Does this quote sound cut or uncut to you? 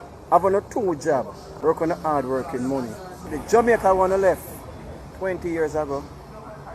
cut